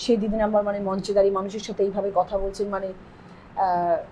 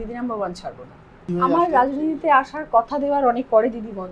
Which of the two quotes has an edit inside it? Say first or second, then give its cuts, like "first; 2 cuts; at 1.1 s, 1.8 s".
second; 1 cut; at 1.2 s